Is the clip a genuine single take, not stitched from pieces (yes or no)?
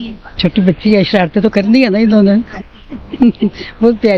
no